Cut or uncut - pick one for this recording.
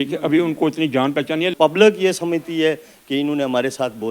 cut